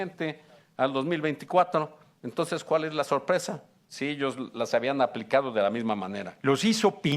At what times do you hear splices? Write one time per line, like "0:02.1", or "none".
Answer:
0:06.2